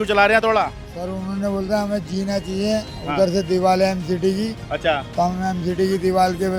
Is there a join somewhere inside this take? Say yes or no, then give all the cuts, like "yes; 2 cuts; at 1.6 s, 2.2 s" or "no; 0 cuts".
no; 0 cuts